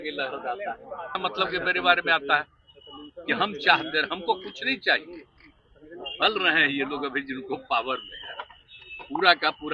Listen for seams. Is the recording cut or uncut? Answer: cut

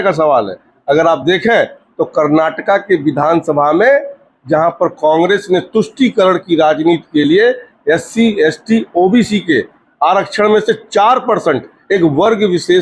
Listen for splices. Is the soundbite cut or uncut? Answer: uncut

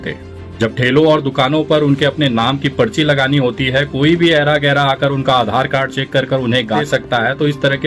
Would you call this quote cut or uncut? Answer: cut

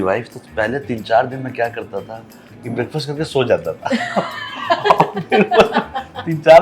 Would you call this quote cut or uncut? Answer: uncut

